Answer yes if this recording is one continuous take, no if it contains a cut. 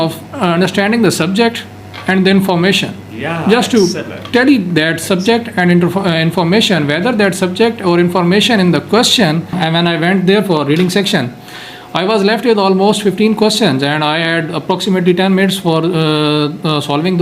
no